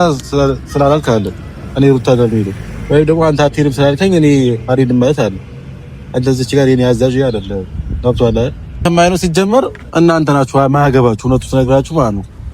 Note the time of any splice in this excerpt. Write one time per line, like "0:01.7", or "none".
0:08.8